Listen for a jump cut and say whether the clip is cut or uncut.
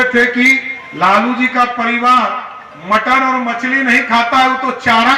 uncut